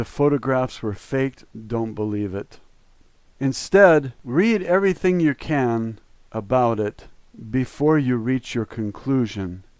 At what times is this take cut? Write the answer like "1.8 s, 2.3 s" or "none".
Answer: 1.9 s